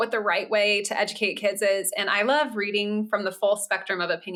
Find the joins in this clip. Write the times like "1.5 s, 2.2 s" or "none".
none

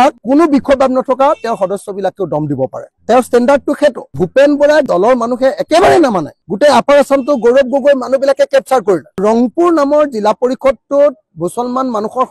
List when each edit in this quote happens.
4.2 s, 4.9 s, 9.2 s

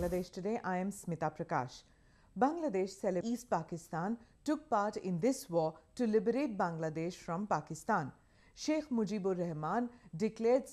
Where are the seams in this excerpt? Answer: none

